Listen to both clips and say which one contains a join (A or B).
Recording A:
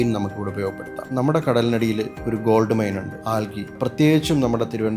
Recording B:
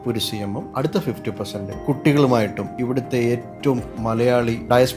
A